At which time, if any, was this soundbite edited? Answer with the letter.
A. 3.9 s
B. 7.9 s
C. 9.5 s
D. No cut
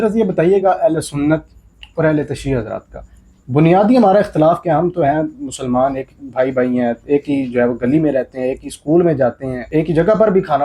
C